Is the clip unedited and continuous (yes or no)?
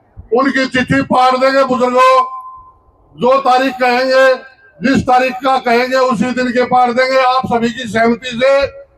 yes